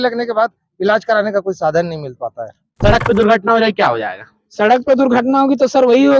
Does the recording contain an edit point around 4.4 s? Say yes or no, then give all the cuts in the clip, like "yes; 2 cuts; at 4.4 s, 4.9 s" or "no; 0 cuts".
no; 1 cut; at 2.7 s